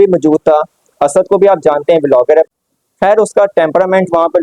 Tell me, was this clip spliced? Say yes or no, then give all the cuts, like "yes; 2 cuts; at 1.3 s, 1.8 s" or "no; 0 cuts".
yes; 1 cut; at 2.5 s